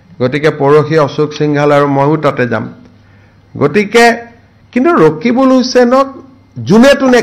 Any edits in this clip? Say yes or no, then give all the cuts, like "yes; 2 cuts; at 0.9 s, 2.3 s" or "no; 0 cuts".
no; 0 cuts